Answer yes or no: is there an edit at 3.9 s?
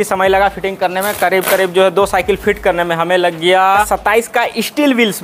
yes